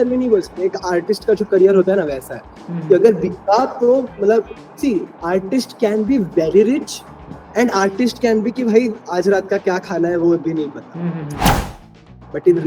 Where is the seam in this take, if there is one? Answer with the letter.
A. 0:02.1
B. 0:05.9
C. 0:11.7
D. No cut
C